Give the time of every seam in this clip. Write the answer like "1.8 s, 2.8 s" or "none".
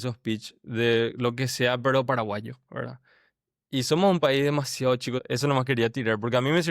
5.2 s